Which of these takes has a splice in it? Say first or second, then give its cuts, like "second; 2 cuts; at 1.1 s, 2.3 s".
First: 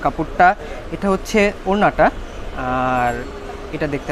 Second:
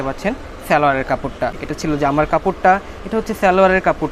second; 1 cut; at 1.6 s